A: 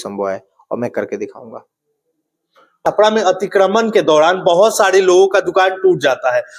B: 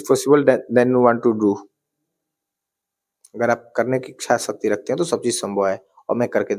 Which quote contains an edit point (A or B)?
A